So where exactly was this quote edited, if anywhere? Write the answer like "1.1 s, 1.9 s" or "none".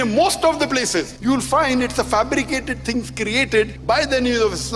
1.1 s, 3.8 s